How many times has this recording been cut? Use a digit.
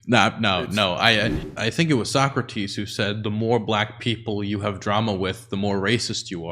1